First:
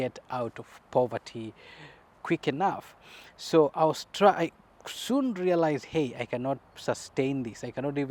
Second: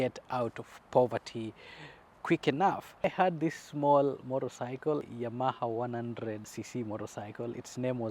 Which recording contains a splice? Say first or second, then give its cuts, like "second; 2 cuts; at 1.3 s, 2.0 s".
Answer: second; 3 cuts; at 3.0 s, 5.1 s, 6.5 s